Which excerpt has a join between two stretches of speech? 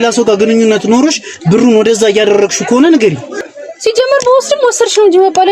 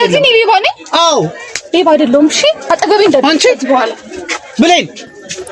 first; 1 cut; at 3.3 s

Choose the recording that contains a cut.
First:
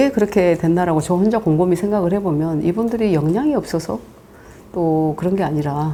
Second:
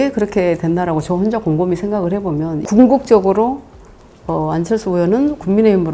second; 1 cut; at 2.6 s

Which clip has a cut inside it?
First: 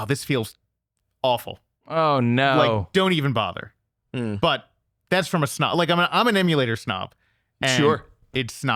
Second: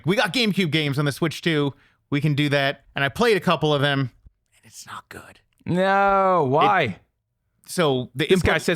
second; 1 cut; at 2.9 s

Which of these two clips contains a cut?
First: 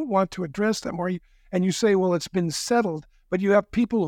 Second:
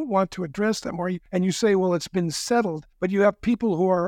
second; 2 cuts; at 1.2 s, 2.8 s

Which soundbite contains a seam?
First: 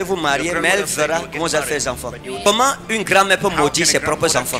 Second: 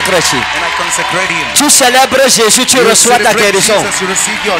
first; 1 cut; at 2.5 s

